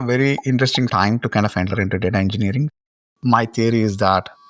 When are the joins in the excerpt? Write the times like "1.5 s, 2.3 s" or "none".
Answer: 0.9 s, 3.0 s